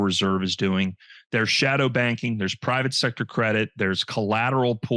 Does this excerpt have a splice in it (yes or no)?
no